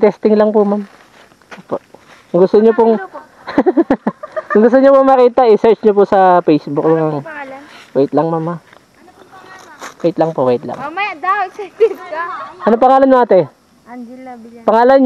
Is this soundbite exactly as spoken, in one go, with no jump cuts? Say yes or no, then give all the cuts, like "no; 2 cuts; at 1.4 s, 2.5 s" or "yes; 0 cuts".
no; 1 cut; at 2.7 s